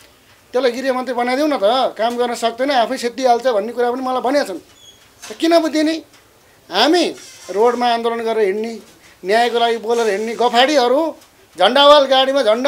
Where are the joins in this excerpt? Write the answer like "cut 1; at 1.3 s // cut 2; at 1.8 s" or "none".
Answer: none

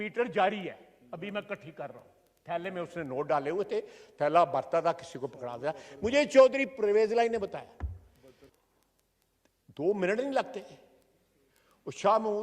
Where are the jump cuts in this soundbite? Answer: cut 1; at 8.5 s

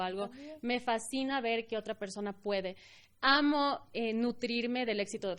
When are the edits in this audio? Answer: none

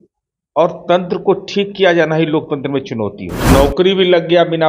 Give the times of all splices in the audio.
cut 1; at 3.5 s

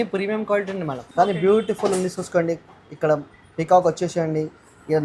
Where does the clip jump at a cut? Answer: cut 1; at 1.0 s

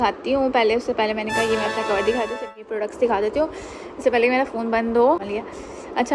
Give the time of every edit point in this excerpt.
cut 1; at 2.6 s // cut 2; at 5.3 s

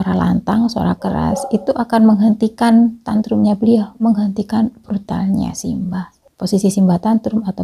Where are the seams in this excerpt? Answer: cut 1; at 4.0 s // cut 2; at 6.4 s

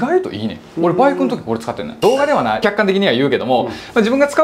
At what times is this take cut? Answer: cut 1; at 2.0 s // cut 2; at 2.6 s

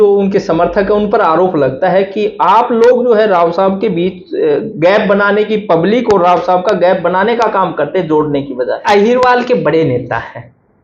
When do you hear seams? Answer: cut 1; at 8.8 s

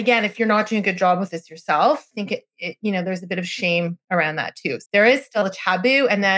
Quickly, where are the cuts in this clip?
cut 1; at 2.2 s // cut 2; at 4.8 s

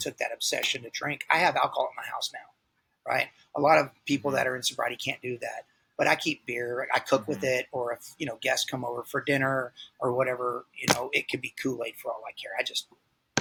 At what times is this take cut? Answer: none

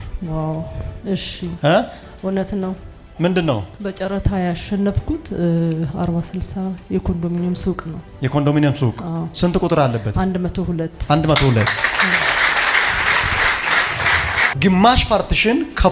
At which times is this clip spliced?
cut 1; at 14.5 s

